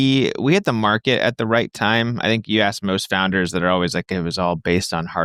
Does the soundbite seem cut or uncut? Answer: uncut